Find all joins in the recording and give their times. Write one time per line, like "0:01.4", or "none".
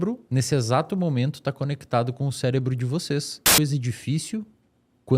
0:03.6